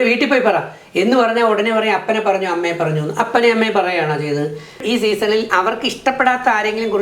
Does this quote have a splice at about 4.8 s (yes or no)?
yes